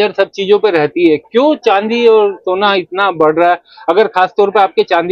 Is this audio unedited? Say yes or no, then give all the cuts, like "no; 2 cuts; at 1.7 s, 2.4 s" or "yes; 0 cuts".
yes; 0 cuts